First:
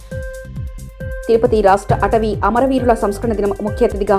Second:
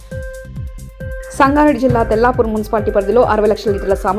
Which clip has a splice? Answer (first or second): second